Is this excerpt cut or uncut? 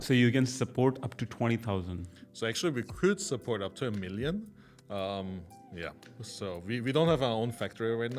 uncut